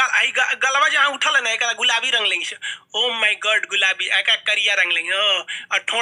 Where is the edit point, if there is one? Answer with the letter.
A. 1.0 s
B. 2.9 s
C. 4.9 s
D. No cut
D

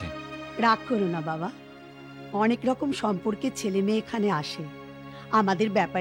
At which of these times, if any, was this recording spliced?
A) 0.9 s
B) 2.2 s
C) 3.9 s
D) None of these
D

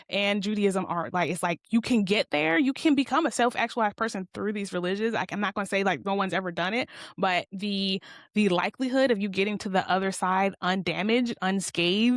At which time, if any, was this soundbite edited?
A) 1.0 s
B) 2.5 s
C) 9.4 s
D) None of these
D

